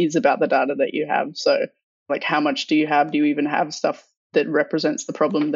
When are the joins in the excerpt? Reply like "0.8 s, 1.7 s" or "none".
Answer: none